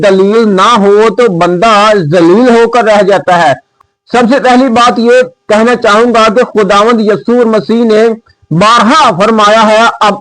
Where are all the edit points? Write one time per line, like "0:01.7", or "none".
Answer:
0:03.7